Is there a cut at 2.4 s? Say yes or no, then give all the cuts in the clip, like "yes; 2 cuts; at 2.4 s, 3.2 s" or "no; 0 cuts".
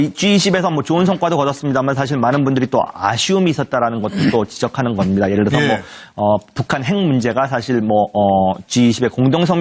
no; 1 cut; at 8.3 s